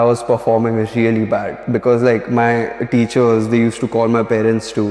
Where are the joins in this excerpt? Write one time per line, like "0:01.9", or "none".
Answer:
0:01.6